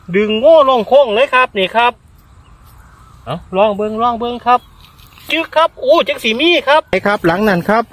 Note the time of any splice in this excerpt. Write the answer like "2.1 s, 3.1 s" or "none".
6.9 s